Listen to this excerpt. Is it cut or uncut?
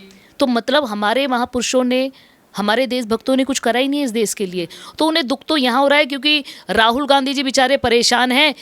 uncut